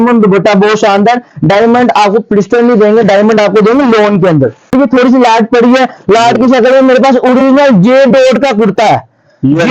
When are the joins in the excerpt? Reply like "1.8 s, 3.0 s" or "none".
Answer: 4.7 s